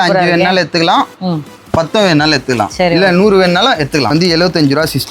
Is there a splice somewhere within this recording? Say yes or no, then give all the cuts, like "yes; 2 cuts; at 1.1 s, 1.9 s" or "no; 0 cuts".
yes; 1 cut; at 4.1 s